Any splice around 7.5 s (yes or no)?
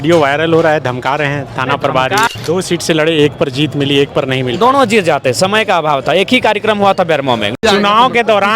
yes